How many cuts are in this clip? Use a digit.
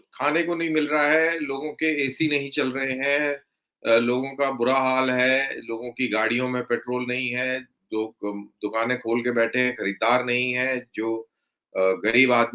0